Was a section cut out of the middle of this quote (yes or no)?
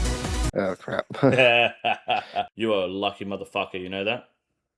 yes